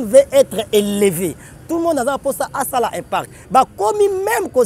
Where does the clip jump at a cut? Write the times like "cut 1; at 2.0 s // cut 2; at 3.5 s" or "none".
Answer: cut 1; at 1.0 s